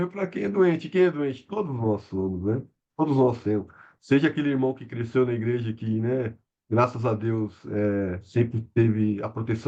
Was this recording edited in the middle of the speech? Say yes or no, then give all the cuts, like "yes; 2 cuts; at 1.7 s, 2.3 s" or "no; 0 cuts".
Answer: no; 0 cuts